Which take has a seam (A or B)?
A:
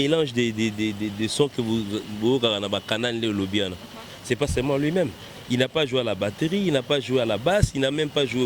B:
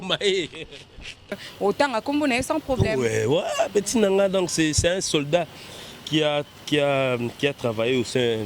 B